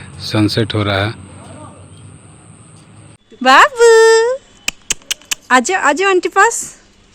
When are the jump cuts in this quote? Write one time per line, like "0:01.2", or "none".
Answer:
0:03.2